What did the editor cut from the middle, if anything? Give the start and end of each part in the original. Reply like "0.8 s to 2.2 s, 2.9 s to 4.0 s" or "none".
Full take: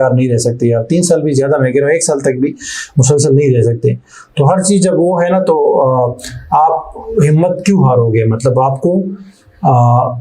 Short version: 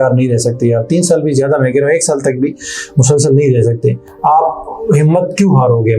4.1 s to 6.4 s